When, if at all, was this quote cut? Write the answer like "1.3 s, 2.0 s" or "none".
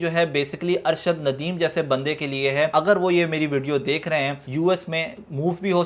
2.7 s, 4.4 s